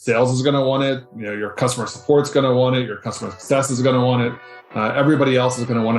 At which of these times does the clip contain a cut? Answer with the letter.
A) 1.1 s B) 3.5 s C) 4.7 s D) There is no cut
A